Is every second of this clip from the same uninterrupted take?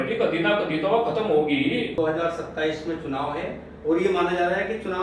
no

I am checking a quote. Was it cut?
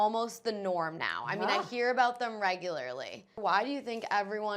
yes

